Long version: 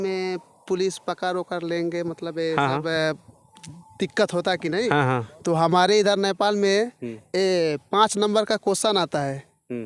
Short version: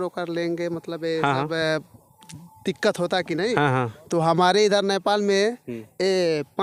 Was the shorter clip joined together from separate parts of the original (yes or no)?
no